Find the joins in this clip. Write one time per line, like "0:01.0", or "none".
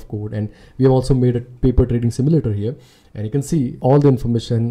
0:03.8